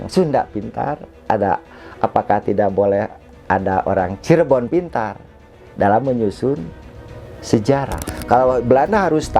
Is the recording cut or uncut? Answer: cut